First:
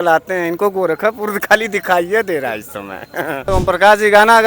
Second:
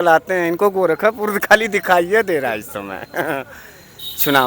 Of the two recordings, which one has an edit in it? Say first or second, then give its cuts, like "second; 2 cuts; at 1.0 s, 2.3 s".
first; 1 cut; at 3.5 s